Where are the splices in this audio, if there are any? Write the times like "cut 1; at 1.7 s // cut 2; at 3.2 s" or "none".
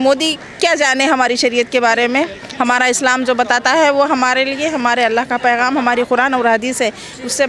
none